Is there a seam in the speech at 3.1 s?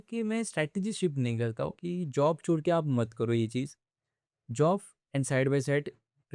no; 1 cut; at 1.8 s

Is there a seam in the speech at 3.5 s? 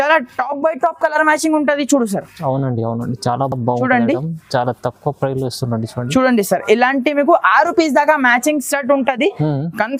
no; 0 cuts

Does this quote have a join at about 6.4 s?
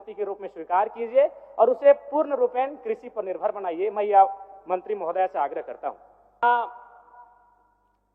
yes; 1 cut; at 6.4 s

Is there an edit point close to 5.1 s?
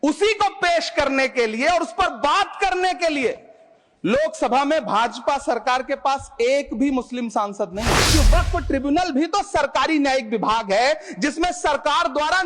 no; 1 cut; at 8.0 s

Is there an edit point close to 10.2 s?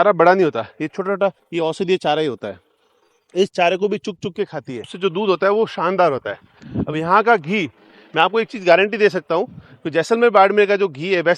no; 2 cuts; at 1.4 s, 4.9 s

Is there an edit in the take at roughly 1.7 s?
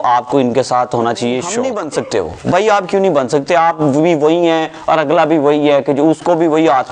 yes; 1 cut; at 1.7 s

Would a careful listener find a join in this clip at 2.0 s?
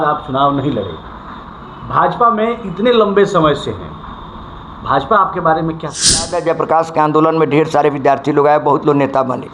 no; 1 cut; at 6.3 s

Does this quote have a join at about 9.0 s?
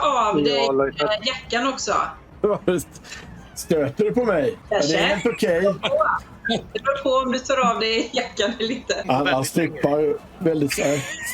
yes; 3 cuts; at 2.2 s, 4.6 s, 9.0 s

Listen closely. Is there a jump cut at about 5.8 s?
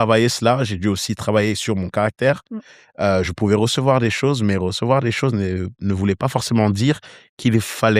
no; 0 cuts

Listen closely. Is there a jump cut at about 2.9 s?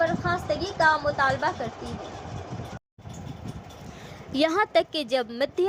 no; 0 cuts

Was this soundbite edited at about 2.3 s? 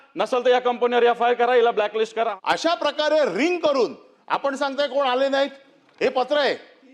yes; 1 cut; at 2.3 s

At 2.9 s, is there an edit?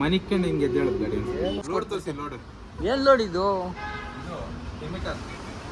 no; 1 cut; at 1.6 s

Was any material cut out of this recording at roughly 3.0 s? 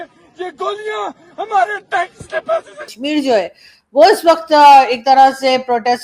yes; 1 cut; at 3.0 s

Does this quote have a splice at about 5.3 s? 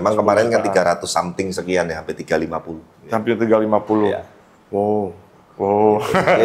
no; 0 cuts

